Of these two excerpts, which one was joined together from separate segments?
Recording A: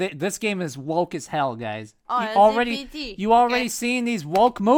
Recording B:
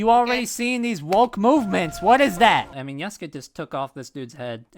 B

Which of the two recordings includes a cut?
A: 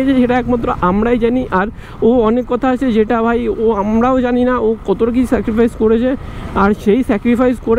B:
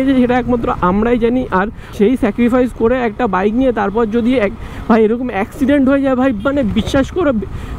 B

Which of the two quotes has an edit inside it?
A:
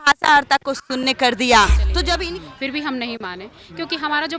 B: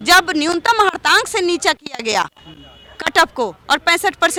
A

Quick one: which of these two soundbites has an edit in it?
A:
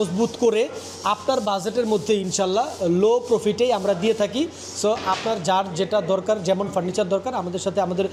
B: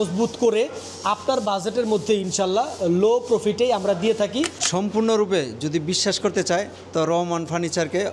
B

